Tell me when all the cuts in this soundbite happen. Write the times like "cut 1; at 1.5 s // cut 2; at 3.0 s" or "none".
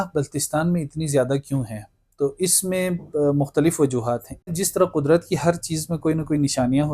cut 1; at 4.5 s